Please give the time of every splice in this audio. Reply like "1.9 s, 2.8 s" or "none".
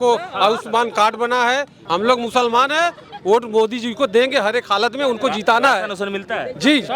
1.8 s